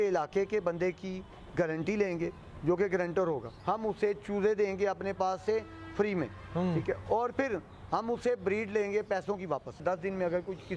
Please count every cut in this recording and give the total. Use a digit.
2